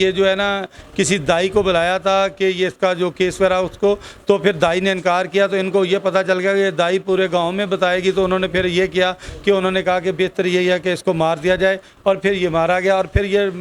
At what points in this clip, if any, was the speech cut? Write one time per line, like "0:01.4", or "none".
none